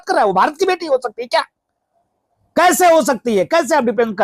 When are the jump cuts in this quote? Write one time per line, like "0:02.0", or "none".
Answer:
none